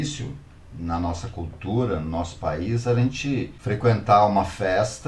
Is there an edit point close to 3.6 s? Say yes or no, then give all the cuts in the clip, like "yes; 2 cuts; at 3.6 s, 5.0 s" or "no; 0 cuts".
yes; 1 cut; at 3.6 s